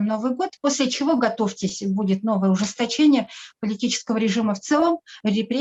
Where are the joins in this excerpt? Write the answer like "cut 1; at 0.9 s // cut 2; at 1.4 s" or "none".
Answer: none